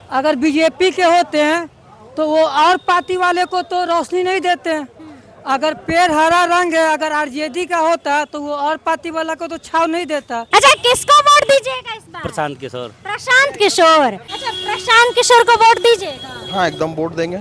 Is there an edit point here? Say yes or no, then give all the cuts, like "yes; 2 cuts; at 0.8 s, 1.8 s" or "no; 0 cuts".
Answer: yes; 2 cuts; at 10.4 s, 14.2 s